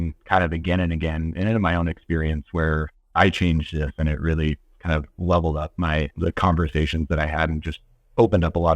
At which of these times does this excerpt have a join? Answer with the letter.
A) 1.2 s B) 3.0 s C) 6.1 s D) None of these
C